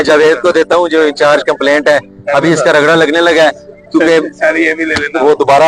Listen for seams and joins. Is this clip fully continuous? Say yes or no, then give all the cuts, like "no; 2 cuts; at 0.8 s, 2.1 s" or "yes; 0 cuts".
yes; 0 cuts